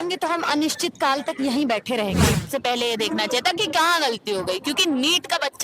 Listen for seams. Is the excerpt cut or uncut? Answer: cut